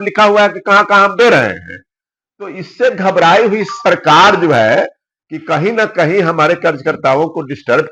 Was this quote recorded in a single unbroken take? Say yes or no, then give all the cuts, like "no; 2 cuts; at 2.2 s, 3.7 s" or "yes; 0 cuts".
yes; 0 cuts